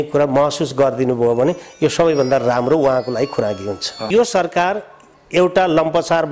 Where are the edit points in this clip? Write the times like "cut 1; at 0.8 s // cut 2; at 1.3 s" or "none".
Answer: cut 1; at 4.0 s